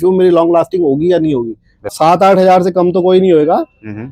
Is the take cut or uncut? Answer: cut